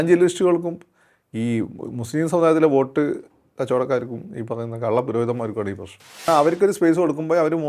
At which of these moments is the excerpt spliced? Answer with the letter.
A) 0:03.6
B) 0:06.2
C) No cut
B